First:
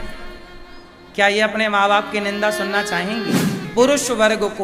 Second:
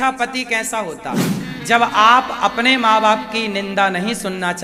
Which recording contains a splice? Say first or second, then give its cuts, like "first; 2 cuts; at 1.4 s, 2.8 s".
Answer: first; 1 cut; at 3.7 s